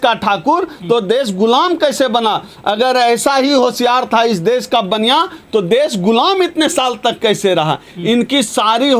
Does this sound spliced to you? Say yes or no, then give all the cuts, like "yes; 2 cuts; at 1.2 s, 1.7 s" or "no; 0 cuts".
no; 0 cuts